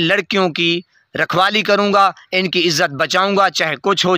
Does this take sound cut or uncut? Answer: uncut